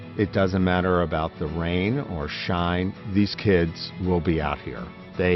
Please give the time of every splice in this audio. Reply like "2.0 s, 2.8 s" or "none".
none